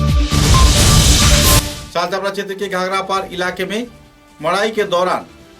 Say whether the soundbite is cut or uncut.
cut